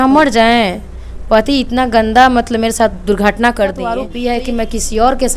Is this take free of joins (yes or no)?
no